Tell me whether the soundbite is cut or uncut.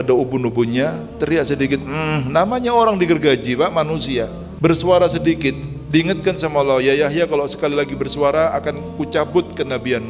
cut